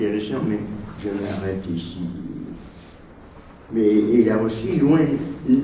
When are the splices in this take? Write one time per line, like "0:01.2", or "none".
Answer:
0:01.4